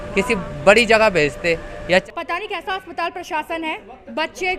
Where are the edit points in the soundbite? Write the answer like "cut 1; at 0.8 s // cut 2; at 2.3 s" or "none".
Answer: cut 1; at 2.1 s